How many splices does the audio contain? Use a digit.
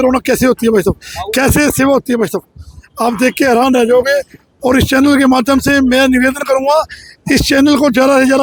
0